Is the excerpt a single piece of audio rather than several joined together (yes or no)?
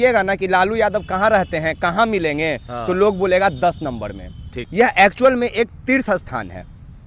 no